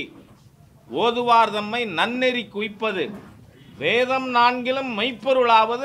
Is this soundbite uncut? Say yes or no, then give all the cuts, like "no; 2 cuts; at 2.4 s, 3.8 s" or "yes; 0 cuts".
yes; 0 cuts